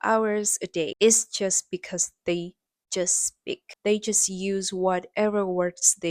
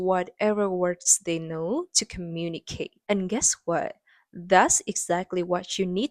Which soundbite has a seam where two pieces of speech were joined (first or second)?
first